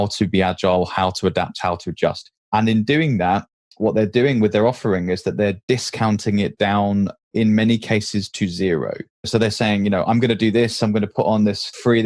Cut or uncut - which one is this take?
uncut